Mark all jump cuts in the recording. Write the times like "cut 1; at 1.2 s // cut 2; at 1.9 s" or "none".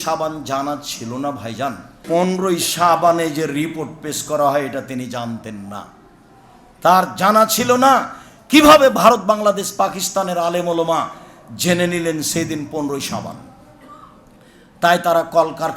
cut 1; at 2.0 s